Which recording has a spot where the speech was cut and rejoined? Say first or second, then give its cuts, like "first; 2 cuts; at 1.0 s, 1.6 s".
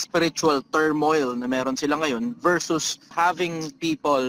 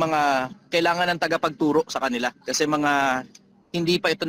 first; 1 cut; at 3.1 s